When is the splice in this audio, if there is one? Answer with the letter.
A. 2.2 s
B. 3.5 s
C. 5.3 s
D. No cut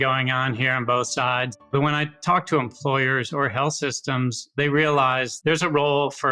C